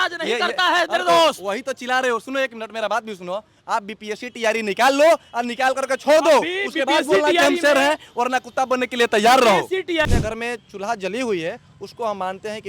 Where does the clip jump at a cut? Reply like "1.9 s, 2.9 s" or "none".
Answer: 10.0 s